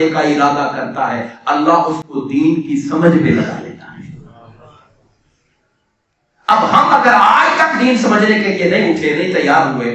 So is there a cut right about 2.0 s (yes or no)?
no